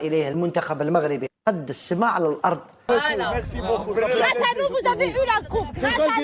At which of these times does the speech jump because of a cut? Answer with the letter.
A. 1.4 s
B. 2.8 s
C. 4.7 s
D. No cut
B